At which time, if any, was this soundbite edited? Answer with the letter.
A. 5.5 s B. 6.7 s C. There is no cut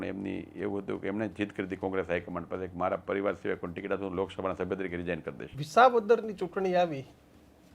A